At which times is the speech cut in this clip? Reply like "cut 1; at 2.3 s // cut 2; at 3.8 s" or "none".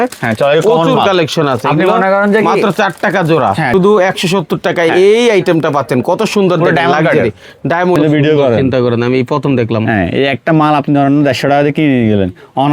cut 1; at 3.7 s // cut 2; at 7.9 s

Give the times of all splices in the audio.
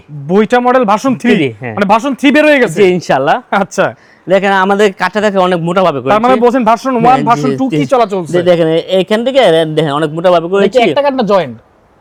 none

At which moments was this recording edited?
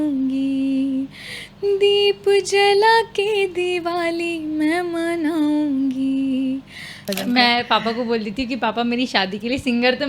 cut 1; at 7.0 s

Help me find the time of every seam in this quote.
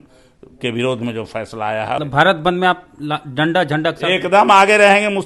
cut 1; at 2.0 s

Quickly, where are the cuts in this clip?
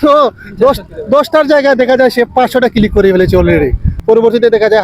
cut 1; at 3.9 s

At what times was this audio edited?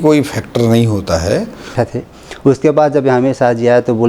cut 1; at 1.7 s

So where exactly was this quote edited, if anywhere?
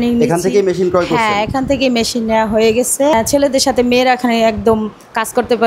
cut 1; at 3.1 s

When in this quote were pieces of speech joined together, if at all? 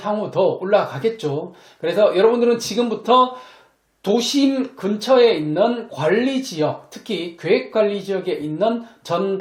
none

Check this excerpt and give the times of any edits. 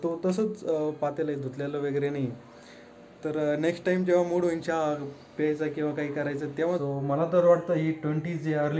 cut 1; at 6.8 s

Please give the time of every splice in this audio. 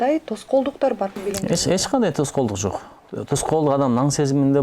cut 1; at 1.2 s

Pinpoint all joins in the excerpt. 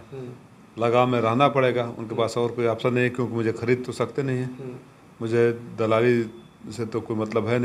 none

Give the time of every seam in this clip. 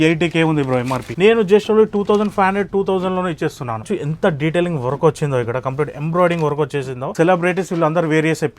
cut 1; at 1.0 s // cut 2; at 3.9 s // cut 3; at 7.1 s

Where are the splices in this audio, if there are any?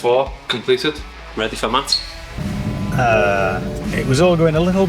cut 1; at 0.8 s // cut 2; at 2.1 s

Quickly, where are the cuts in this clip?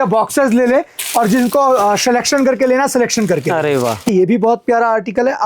cut 1; at 4.1 s

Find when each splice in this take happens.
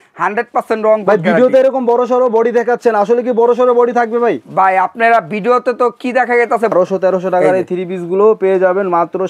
cut 1; at 6.7 s

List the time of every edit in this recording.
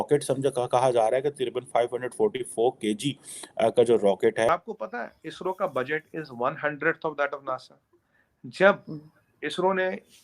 cut 1; at 4.5 s

